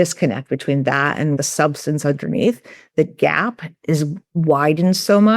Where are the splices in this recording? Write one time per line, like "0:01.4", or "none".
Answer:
0:01.4